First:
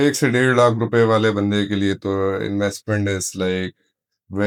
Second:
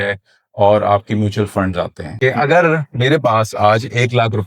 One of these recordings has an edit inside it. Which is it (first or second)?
second